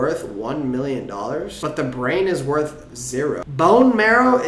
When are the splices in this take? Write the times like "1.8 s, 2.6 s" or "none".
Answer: 1.5 s, 3.4 s